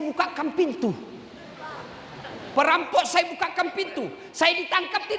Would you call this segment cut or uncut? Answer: uncut